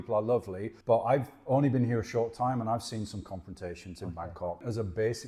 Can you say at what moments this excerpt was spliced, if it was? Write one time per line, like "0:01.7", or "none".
none